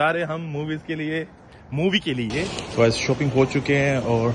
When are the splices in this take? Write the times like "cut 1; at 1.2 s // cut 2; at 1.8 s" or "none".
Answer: cut 1; at 2.6 s